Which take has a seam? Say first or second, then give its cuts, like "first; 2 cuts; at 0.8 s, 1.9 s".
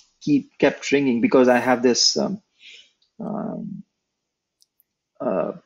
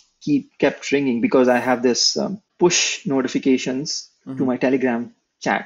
second; 1 cut; at 2.4 s